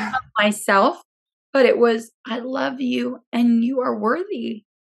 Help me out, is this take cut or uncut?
uncut